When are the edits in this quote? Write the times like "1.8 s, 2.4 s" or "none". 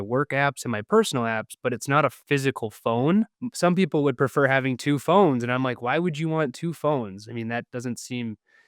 3.4 s